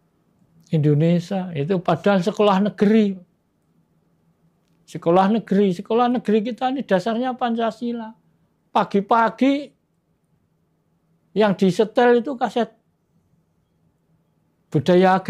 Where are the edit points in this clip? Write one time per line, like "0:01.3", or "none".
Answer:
none

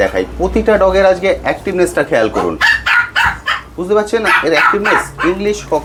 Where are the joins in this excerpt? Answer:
none

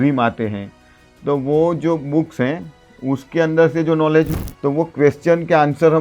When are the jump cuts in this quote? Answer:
0:04.3

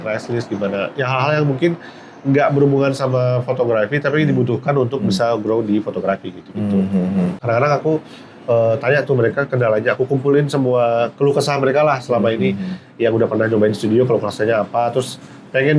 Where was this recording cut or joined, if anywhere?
0:07.4

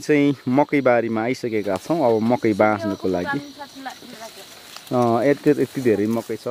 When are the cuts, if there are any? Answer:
none

